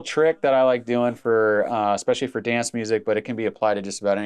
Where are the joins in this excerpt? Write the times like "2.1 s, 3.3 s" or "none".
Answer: none